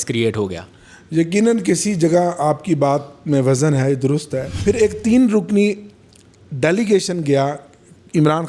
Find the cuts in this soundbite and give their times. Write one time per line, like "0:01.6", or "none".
0:04.4